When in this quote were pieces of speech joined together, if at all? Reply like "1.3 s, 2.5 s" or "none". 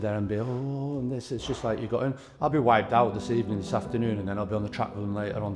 none

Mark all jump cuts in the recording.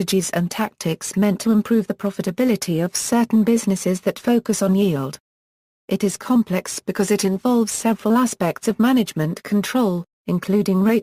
2.8 s

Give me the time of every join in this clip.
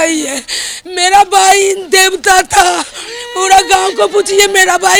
none

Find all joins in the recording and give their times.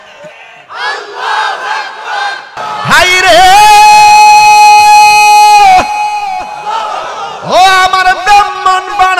2.6 s

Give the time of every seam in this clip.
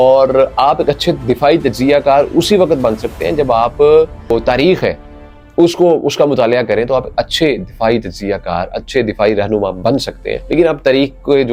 none

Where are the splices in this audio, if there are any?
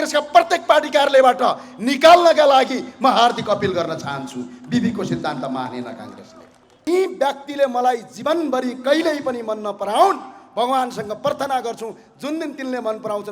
6.9 s

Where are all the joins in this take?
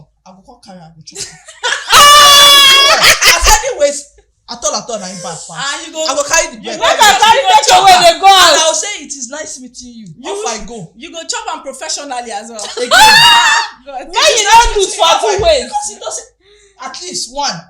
none

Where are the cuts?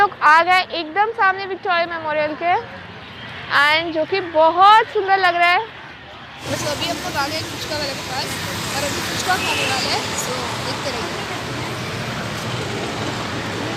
6.3 s

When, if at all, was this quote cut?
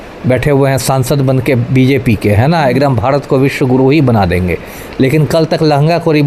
none

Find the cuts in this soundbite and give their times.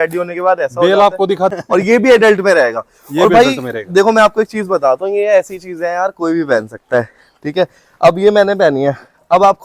1.6 s

